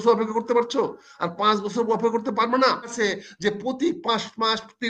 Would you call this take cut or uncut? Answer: cut